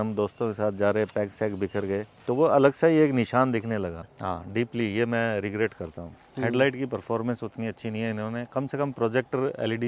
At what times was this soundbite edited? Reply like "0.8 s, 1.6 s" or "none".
4.1 s